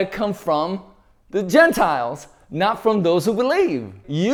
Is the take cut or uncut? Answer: uncut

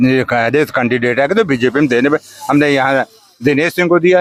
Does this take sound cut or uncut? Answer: uncut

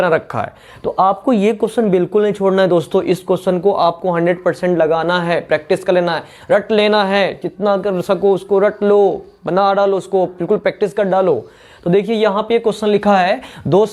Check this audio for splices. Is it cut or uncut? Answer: uncut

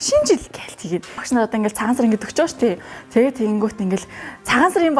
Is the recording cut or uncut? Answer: cut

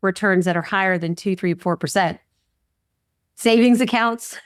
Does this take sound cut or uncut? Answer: uncut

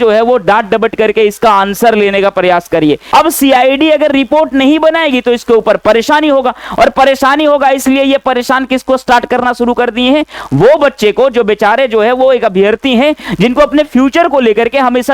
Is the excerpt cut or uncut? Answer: cut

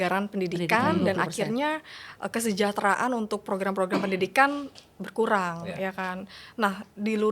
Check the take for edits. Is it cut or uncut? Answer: uncut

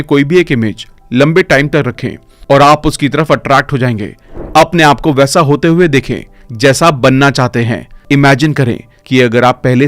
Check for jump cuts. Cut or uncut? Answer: cut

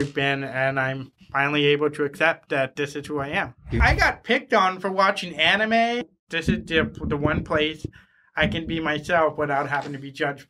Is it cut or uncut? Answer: cut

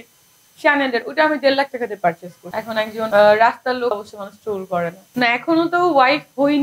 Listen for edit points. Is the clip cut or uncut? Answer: cut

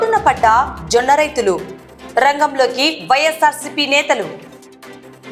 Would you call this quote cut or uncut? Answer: uncut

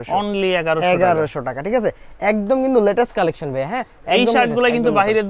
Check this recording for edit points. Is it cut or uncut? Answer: uncut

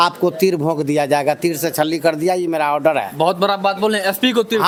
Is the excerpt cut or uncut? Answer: uncut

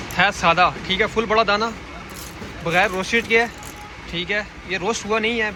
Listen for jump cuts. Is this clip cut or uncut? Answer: uncut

